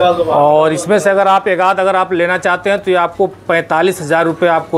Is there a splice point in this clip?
no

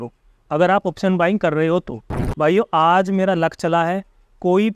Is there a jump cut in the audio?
yes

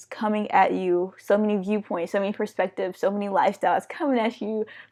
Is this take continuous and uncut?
yes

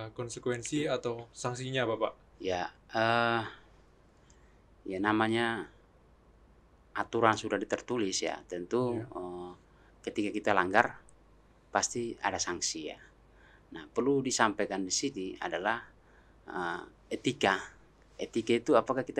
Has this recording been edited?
no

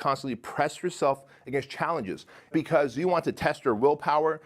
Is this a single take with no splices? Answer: no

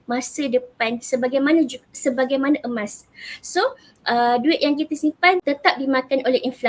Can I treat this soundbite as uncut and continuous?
no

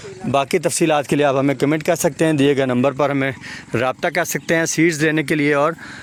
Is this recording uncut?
yes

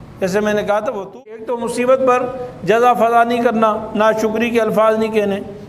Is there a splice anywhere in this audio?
yes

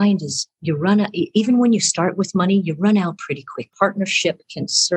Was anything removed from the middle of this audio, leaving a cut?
yes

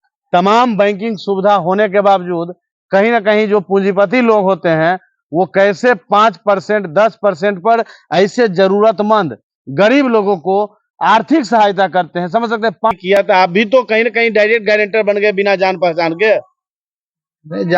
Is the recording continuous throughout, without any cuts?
no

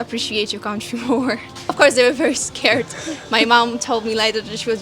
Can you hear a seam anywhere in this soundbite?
yes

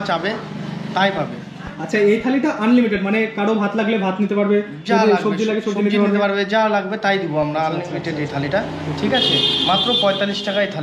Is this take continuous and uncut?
yes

